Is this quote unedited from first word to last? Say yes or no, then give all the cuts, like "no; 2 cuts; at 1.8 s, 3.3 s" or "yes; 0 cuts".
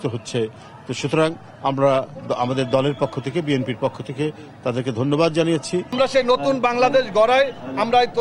no; 1 cut; at 5.9 s